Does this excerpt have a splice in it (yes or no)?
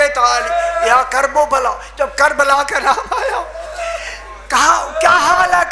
no